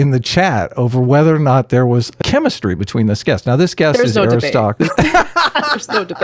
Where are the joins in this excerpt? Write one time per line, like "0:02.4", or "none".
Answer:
0:02.2
0:04.7

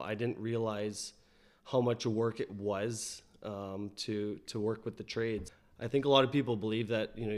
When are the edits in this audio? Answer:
0:05.6

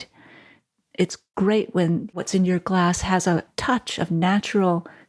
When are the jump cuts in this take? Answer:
0:01.2
0:02.1

